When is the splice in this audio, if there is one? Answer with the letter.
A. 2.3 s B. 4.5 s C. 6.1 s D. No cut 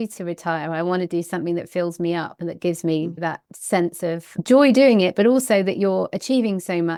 D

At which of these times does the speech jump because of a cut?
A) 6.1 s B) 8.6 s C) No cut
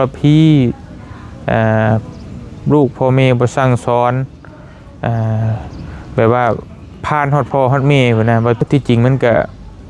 B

